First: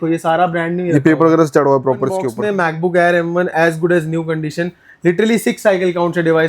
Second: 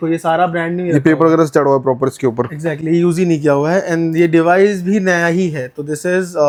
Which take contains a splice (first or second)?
first